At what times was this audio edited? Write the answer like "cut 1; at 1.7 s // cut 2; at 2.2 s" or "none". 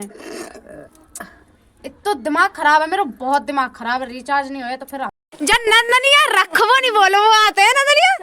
cut 1; at 5.2 s